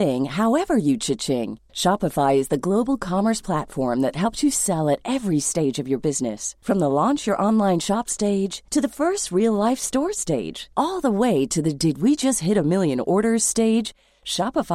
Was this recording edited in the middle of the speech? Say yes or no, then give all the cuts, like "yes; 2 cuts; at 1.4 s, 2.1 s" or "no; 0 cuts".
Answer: no; 0 cuts